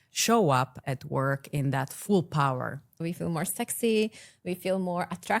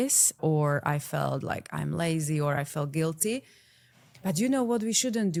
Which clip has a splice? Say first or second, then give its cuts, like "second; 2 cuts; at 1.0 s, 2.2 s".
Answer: first; 1 cut; at 3.0 s